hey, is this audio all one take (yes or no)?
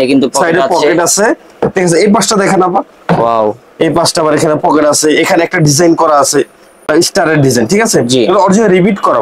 yes